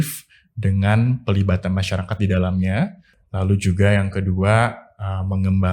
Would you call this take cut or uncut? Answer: uncut